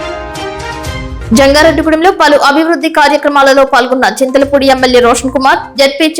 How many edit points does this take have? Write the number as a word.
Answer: one